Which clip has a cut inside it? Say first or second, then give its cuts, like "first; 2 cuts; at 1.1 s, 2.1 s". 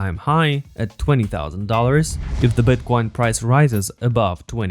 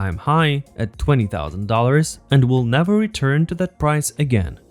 first; 1 cut; at 2.2 s